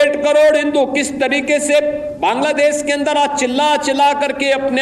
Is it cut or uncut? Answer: uncut